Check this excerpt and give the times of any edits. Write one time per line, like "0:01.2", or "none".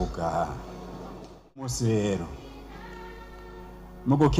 0:01.8